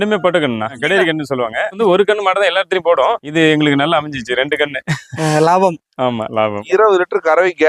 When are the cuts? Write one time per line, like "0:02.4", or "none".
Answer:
0:01.7
0:03.3
0:06.6